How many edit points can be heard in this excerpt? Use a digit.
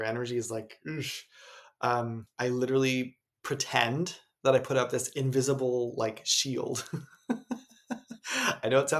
1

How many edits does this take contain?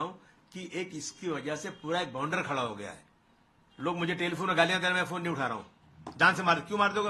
0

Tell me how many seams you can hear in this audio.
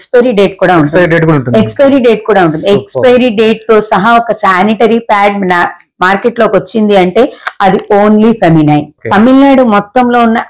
1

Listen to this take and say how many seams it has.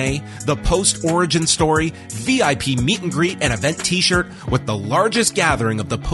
0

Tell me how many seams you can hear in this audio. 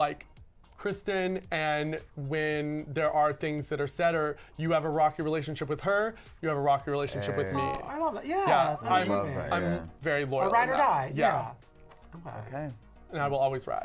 0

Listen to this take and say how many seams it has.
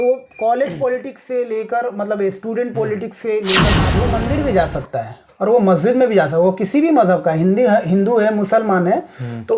1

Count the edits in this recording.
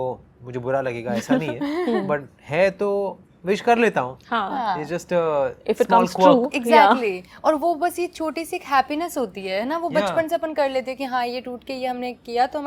0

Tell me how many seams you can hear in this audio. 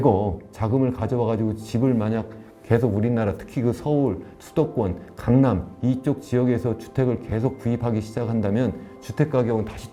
0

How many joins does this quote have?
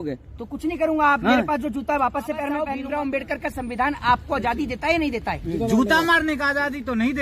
1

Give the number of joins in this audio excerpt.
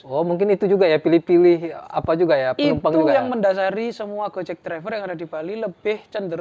0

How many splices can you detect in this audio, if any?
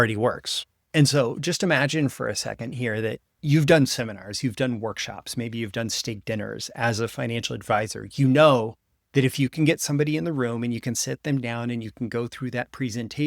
1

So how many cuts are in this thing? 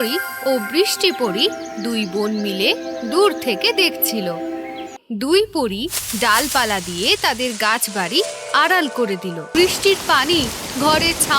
2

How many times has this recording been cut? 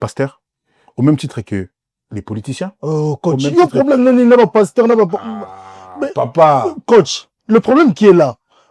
0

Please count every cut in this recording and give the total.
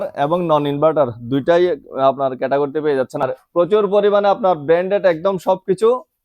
1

